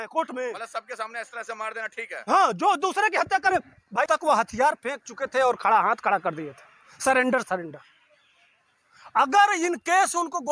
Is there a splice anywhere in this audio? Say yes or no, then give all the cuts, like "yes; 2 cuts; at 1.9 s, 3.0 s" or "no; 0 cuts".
yes; 1 cut; at 4.1 s